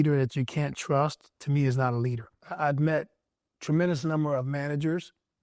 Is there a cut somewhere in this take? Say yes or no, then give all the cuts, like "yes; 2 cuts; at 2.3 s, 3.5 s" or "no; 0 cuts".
yes; 1 cut; at 2.4 s